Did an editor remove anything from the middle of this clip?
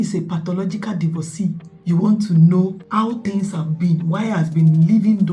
yes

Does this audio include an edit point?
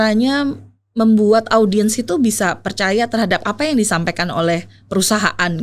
no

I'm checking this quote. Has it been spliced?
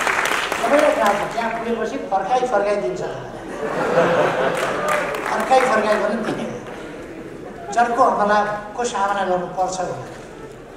no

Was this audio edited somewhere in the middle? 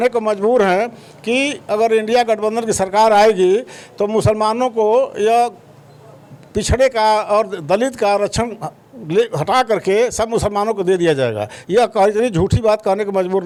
no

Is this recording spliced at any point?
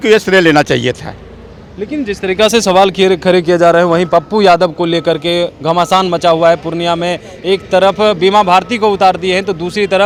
no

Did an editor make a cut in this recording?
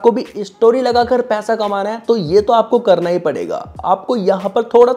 no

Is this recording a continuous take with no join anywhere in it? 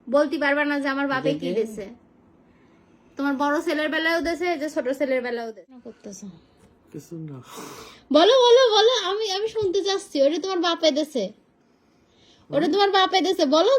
no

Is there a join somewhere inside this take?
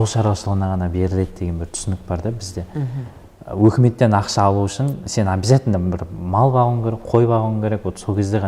no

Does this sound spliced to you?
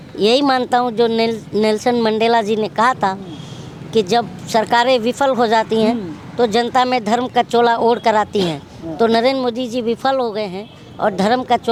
no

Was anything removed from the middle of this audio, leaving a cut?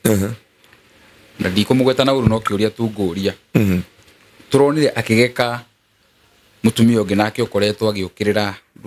no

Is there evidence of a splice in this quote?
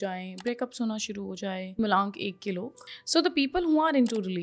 yes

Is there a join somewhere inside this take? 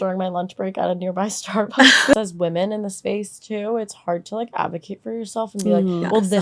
yes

